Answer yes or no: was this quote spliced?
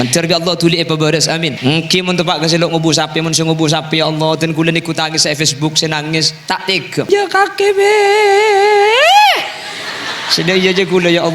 yes